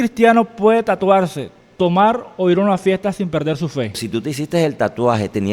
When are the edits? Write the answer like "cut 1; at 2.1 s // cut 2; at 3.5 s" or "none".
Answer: cut 1; at 4.0 s